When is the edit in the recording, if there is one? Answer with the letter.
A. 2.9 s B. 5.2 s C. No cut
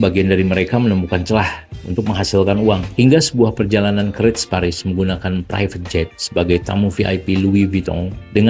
A